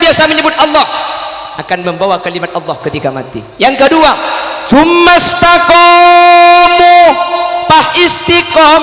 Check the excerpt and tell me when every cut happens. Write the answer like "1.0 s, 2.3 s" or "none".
none